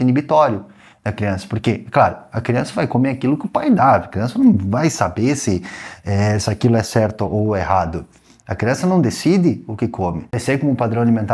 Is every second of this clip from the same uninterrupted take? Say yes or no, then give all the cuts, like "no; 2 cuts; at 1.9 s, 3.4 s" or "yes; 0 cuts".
no; 1 cut; at 10.3 s